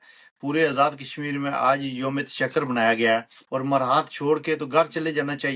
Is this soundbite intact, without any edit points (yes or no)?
no